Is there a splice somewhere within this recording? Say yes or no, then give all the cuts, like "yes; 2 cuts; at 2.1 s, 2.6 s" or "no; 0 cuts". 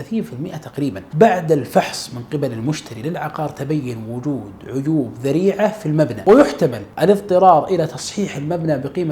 yes; 1 cut; at 6.2 s